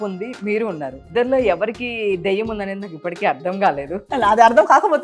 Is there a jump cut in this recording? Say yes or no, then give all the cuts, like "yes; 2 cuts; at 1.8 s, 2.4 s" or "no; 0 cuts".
yes; 2 cuts; at 1.1 s, 4.1 s